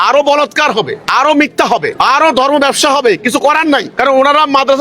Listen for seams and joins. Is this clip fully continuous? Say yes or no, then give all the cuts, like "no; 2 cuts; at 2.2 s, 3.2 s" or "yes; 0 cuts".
no; 3 cuts; at 1.0 s, 1.9 s, 3.9 s